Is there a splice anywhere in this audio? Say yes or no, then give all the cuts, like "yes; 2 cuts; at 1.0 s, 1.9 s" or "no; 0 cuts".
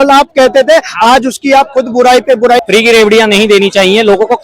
yes; 1 cut; at 2.6 s